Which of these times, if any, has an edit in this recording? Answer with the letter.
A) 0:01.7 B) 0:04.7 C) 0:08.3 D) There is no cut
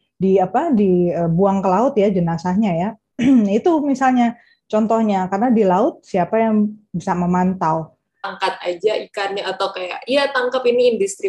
C